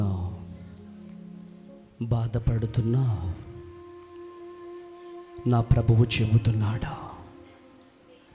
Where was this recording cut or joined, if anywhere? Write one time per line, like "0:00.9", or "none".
none